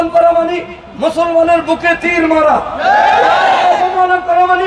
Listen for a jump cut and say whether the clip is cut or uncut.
uncut